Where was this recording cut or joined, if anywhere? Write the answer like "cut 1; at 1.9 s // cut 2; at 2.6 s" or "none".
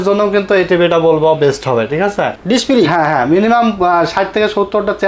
cut 1; at 2.4 s